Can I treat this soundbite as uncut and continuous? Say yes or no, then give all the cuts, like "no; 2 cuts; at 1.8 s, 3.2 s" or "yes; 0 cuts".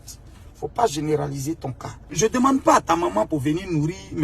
no; 1 cut; at 2.1 s